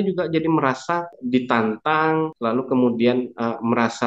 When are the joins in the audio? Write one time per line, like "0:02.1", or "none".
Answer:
0:01.1
0:02.3